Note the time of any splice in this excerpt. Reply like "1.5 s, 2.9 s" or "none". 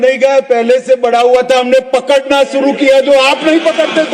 none